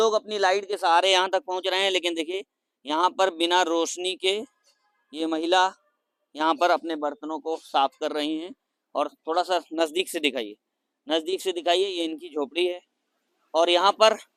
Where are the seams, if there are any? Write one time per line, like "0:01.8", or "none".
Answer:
none